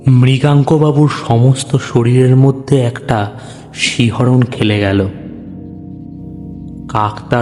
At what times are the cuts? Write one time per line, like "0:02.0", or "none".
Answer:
none

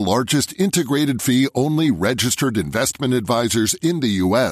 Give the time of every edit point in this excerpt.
none

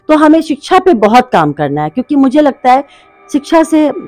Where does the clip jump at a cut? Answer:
none

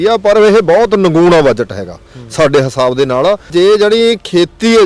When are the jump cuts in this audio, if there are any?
0:03.5

